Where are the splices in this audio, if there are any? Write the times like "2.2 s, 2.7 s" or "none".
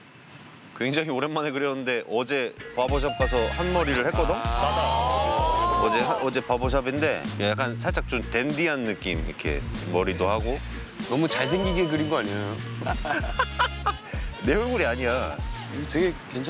none